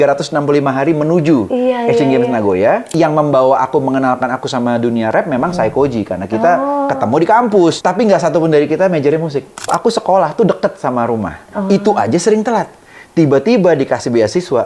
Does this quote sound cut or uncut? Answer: cut